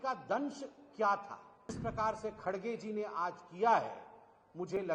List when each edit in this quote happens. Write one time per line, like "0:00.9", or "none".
0:01.8

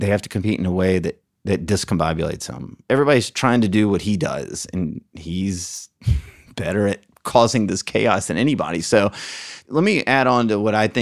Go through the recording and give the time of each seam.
0:01.3
0:02.9
0:09.5

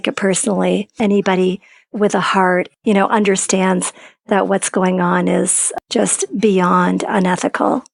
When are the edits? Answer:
0:00.9
0:02.7
0:05.7

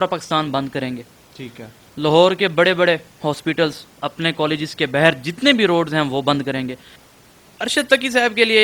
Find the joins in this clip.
0:06.9

